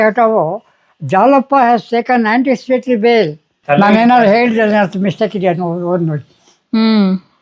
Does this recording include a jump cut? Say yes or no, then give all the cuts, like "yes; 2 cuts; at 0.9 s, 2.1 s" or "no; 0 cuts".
yes; 1 cut; at 3.5 s